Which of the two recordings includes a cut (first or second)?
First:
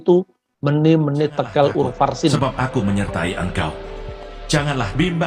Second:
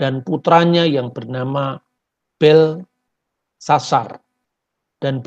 first